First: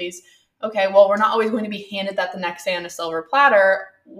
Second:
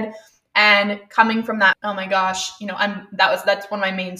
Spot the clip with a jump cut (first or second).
second